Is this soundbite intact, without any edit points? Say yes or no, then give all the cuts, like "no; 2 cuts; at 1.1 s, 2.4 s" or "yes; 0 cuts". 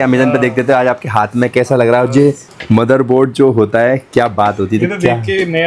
yes; 0 cuts